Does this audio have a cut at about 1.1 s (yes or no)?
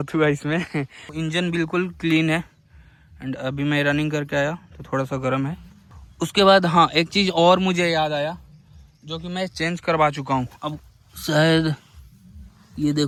no